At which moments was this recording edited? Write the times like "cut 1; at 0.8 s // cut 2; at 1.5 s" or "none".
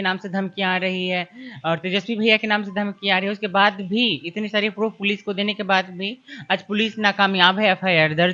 none

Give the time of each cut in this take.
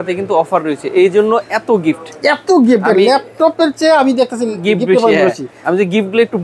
none

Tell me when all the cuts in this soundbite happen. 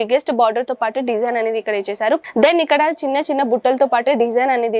cut 1; at 2.2 s

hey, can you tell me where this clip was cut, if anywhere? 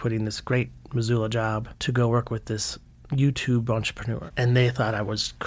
cut 1; at 4.2 s

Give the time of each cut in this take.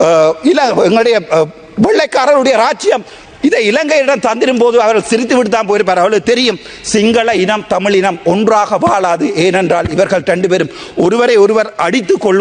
none

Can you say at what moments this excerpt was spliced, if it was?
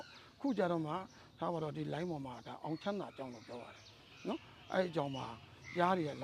none

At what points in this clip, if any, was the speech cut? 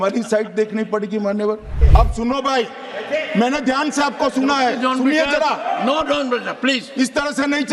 cut 1; at 1.8 s

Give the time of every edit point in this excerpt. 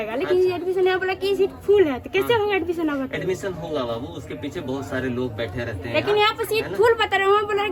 none

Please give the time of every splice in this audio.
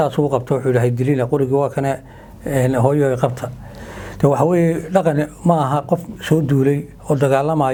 none

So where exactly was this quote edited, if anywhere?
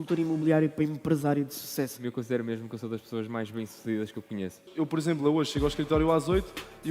cut 1; at 2.0 s // cut 2; at 4.6 s

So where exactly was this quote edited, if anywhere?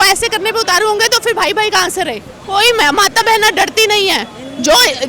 cut 1; at 2.3 s

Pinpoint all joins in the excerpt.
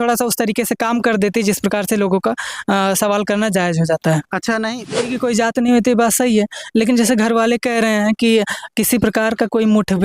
cut 1; at 4.9 s

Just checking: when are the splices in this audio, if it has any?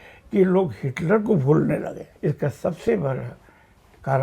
cut 1; at 2.1 s

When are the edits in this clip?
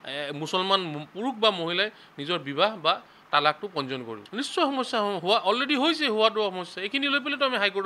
none

